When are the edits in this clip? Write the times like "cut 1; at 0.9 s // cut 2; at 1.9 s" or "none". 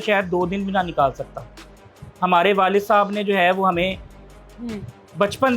none